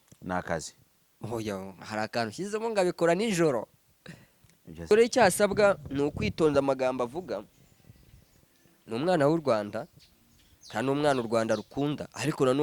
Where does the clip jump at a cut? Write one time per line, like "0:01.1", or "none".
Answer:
0:04.9